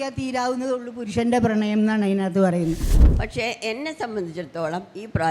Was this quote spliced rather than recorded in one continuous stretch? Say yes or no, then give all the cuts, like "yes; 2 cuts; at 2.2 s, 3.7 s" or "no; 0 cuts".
yes; 1 cut; at 2.9 s